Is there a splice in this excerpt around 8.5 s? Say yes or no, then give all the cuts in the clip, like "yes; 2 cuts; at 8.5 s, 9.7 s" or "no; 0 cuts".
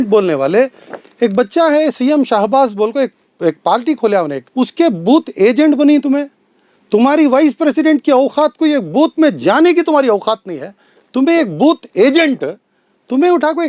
no; 1 cut; at 4.4 s